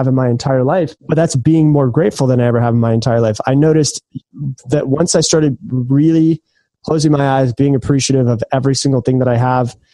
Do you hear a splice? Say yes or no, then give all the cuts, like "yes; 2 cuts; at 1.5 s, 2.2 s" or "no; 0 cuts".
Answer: yes; 1 cut; at 1.0 s